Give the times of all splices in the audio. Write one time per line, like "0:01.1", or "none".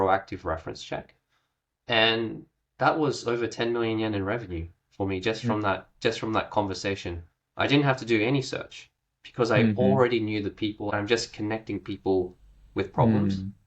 0:10.9